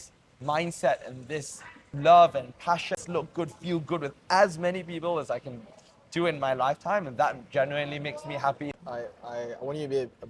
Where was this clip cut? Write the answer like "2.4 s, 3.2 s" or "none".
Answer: 3.0 s, 8.6 s